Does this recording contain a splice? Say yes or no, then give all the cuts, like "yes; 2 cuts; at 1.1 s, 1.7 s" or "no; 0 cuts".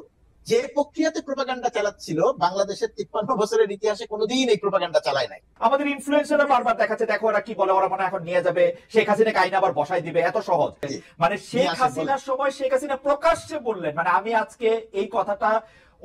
yes; 2 cuts; at 5.4 s, 10.9 s